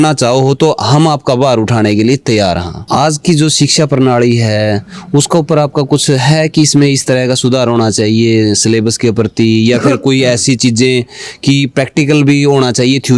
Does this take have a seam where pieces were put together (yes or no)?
yes